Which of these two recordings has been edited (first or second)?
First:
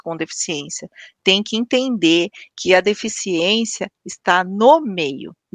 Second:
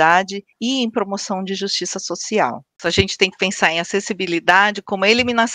second